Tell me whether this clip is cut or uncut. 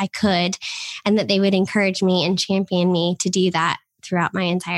uncut